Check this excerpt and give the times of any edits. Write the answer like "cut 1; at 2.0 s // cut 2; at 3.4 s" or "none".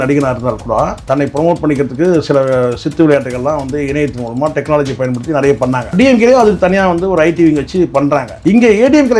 cut 1; at 1.0 s // cut 2; at 5.9 s